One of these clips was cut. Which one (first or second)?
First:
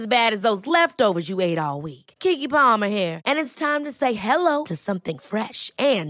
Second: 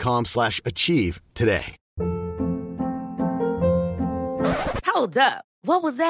second